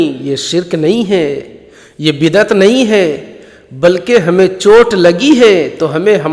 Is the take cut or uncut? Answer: uncut